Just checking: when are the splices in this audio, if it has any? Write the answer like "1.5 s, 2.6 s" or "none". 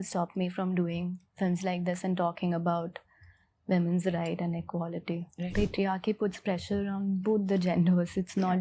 5.5 s